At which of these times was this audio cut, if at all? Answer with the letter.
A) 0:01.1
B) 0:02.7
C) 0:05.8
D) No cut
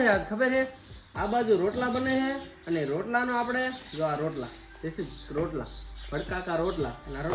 D